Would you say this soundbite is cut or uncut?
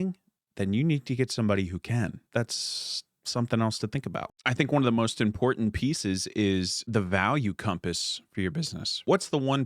uncut